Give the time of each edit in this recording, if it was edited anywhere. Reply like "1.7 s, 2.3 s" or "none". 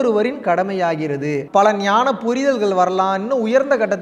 1.4 s